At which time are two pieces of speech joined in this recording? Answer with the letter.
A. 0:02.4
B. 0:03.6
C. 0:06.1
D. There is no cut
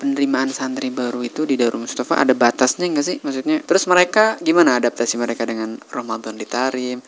B